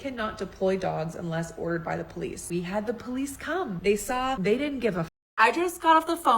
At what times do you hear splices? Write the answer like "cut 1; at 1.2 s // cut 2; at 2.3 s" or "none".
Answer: cut 1; at 2.4 s // cut 2; at 3.8 s // cut 3; at 4.4 s // cut 4; at 5.1 s

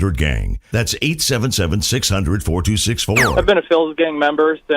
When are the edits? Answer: cut 1; at 3.3 s

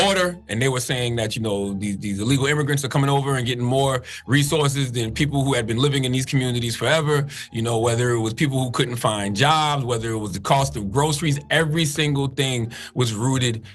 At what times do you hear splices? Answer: none

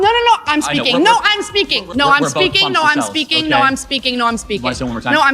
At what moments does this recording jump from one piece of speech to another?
cut 1; at 1.8 s

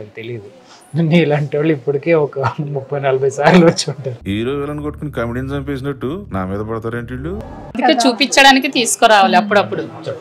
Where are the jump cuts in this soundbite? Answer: cut 1; at 7.8 s

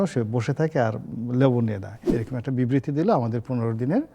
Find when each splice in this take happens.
cut 1; at 1.9 s

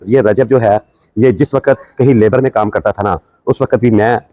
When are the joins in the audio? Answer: none

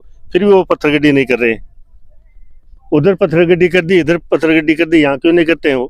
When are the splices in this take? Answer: none

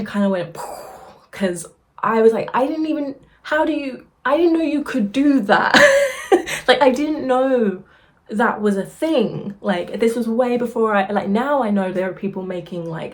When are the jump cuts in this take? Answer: none

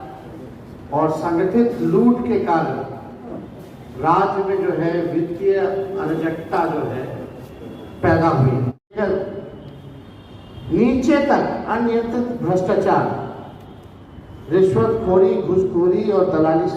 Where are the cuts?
cut 1; at 8.7 s

